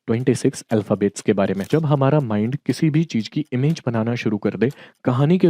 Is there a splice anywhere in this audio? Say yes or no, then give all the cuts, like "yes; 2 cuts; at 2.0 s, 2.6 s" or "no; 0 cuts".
yes; 1 cut; at 1.6 s